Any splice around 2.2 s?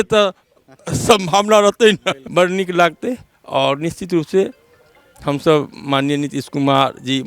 yes; 1 cut; at 2.2 s

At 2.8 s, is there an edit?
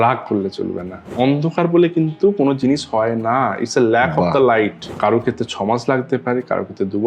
no; 2 cuts; at 1.0 s, 4.8 s

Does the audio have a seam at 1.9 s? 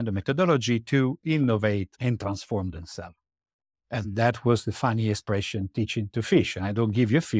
yes; 1 cut; at 1.9 s

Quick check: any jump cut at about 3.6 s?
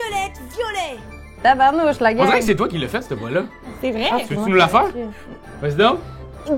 no; 2 cuts; at 1.2 s, 5.2 s

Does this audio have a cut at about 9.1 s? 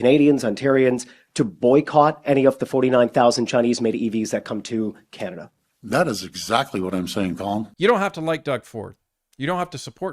no; 1 cut; at 7.7 s

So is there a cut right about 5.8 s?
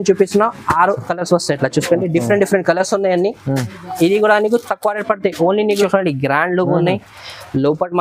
yes; 1 cut; at 5.8 s

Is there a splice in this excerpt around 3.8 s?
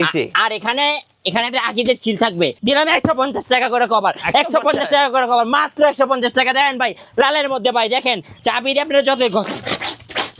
no; 2 cuts; at 2.6 s, 8.3 s

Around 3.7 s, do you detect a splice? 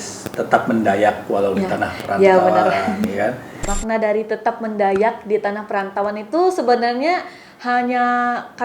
yes; 1 cut; at 3.7 s

